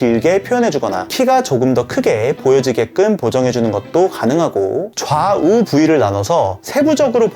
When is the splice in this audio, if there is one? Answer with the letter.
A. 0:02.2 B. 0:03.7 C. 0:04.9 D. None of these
C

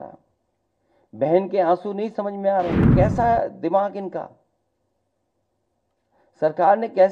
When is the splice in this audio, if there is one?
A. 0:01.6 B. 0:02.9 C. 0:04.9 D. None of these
B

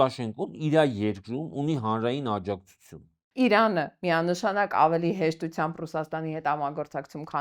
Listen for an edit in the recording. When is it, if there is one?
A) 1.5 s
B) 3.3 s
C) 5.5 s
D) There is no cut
B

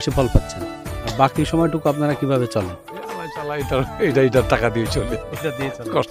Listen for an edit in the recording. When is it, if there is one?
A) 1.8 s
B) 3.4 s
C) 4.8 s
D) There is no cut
D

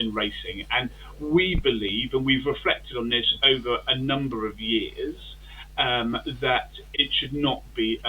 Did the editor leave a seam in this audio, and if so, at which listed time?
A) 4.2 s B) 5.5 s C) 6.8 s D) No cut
C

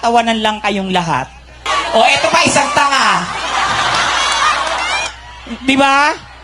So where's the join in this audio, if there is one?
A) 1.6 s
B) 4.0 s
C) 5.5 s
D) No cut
A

